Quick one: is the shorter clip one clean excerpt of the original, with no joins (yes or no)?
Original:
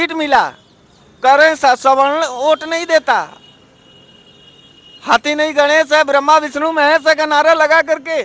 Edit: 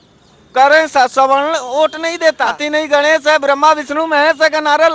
no